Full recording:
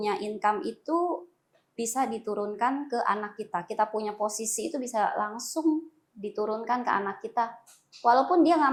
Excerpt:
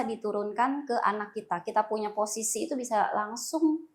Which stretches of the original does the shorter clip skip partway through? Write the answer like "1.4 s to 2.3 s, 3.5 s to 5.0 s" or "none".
none

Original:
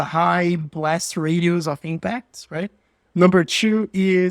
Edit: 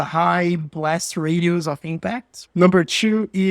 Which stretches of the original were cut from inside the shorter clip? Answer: 2.3 s to 2.9 s

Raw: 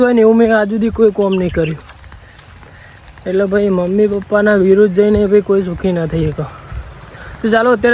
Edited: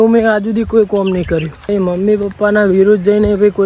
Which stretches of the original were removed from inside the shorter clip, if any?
2.0 s to 3.6 s

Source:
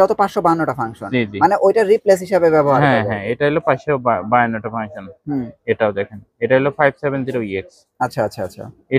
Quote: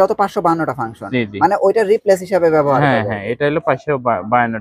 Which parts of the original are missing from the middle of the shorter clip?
none

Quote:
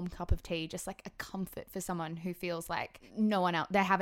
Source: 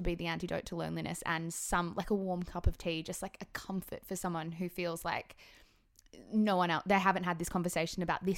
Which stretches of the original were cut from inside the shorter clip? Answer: 5.3 s to 6.1 s

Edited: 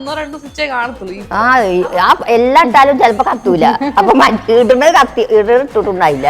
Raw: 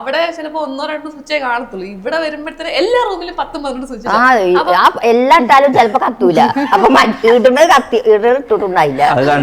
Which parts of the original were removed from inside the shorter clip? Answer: 1.9 s to 4.0 s

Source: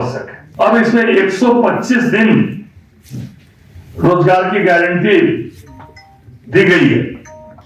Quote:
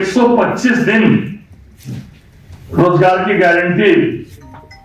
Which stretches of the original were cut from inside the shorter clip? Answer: none

